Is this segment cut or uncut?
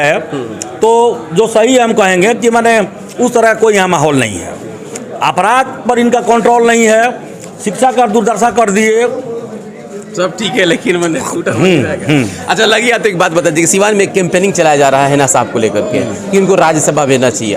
uncut